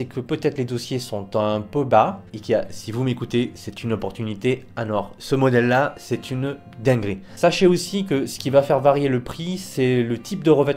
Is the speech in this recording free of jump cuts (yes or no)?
no